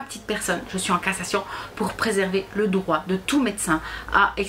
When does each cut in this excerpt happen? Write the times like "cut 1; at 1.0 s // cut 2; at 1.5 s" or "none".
none